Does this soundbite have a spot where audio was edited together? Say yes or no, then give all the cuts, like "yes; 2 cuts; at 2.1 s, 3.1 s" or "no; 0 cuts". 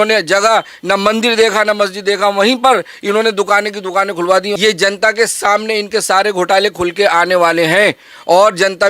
yes; 1 cut; at 4.5 s